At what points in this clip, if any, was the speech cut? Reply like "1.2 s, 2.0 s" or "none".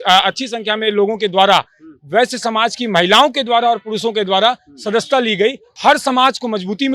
5.7 s